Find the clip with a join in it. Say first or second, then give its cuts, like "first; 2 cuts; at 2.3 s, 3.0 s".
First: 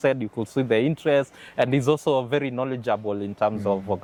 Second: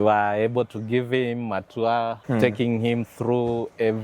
second; 1 cut; at 2.2 s